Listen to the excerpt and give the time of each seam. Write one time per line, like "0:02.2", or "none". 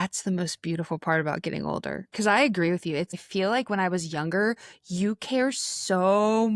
0:03.1